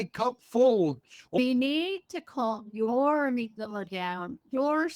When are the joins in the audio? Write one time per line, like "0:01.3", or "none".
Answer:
0:01.4